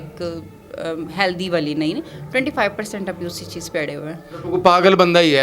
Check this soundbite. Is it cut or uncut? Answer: cut